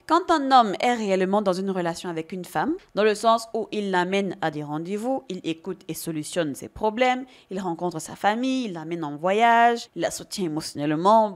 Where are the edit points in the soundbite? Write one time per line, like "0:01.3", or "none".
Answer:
none